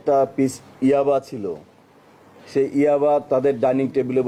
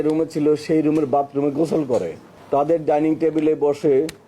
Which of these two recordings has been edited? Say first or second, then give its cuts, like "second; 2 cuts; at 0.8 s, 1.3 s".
second; 1 cut; at 2.3 s